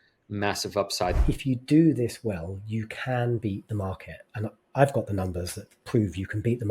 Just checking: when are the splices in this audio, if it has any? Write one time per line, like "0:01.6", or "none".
0:01.2